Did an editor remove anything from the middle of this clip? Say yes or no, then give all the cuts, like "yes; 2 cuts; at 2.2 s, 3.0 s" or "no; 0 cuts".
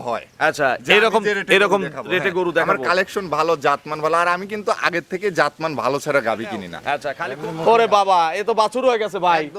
yes; 1 cut; at 7.1 s